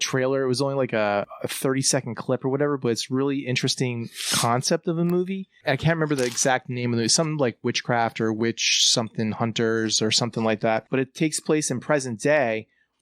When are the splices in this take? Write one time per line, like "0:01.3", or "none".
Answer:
0:01.2
0:05.6
0:10.8